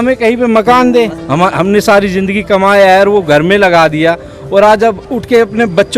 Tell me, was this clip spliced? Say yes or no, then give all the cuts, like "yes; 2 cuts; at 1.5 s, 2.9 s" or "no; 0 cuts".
yes; 1 cut; at 1.2 s